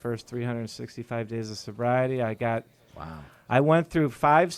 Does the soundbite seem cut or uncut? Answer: uncut